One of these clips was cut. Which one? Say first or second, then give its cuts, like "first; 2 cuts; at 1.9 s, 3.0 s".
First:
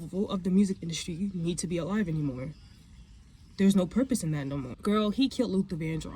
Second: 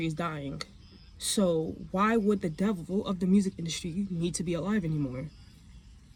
first; 1 cut; at 4.7 s